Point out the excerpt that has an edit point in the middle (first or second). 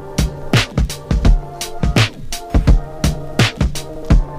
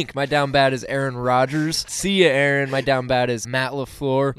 second